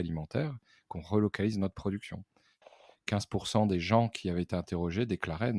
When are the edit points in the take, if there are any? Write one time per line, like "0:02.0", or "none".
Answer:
0:02.7